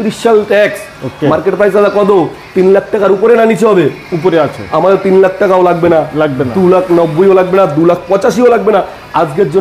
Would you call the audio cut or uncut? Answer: uncut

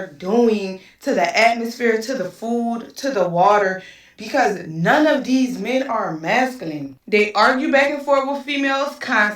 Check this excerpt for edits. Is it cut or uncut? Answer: cut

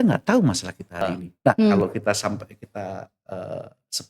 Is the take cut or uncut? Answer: cut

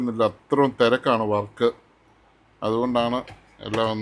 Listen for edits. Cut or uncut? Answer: uncut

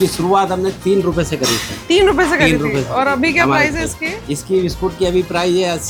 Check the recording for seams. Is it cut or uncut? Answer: uncut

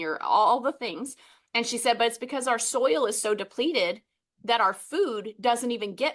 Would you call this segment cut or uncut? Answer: uncut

